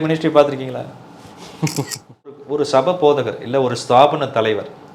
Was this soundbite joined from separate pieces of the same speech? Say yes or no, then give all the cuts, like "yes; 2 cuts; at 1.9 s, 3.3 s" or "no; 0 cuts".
yes; 1 cut; at 2.4 s